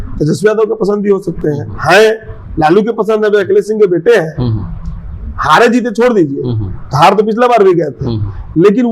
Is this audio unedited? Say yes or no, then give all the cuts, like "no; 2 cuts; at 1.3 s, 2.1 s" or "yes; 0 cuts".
yes; 0 cuts